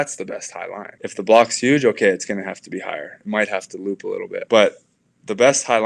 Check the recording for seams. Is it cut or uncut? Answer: cut